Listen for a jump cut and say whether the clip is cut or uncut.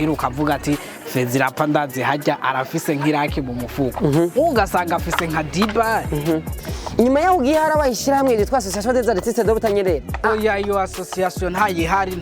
cut